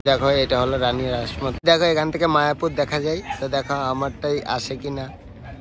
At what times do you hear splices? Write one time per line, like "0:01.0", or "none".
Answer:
0:01.5